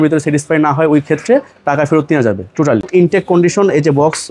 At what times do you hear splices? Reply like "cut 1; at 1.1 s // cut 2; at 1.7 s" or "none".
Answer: cut 1; at 2.9 s

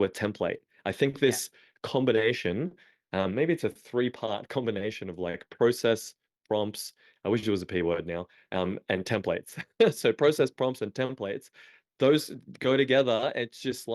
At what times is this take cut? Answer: none

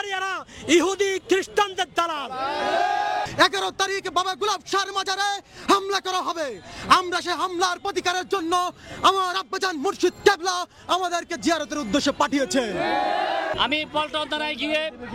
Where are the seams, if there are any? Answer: cut 1; at 3.3 s // cut 2; at 13.5 s

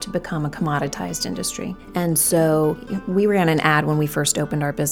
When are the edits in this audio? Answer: cut 1; at 1.8 s // cut 2; at 2.9 s

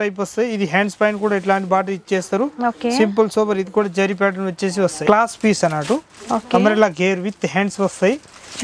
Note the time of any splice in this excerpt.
cut 1; at 5.0 s

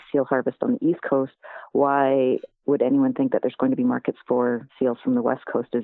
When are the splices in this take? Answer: cut 1; at 4.7 s

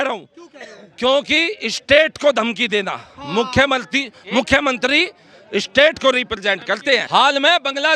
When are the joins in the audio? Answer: cut 1; at 7.0 s

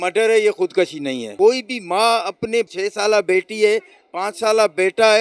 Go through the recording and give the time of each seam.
cut 1; at 1.2 s // cut 2; at 2.7 s

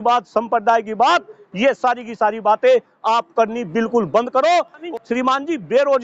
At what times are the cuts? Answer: cut 1; at 4.9 s

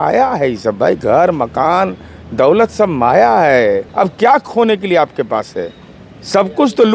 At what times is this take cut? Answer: cut 1; at 3.9 s

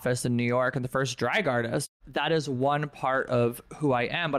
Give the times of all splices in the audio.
cut 1; at 1.9 s

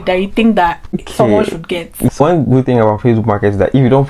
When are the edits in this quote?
cut 1; at 1.1 s // cut 2; at 2.2 s

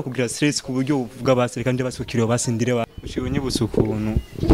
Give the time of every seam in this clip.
cut 1; at 2.8 s

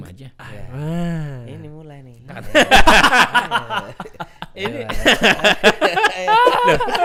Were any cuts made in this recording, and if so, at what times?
none

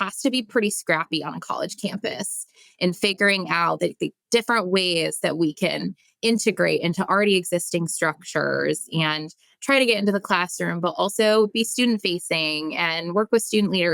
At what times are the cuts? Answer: none

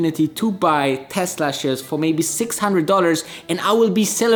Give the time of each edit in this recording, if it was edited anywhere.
none

